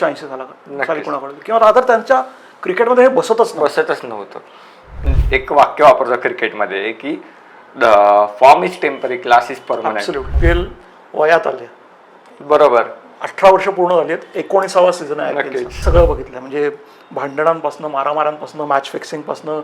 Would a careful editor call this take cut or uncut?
cut